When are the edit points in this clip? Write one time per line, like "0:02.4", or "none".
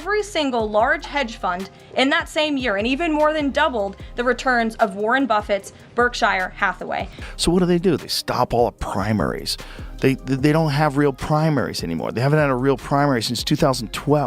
0:07.1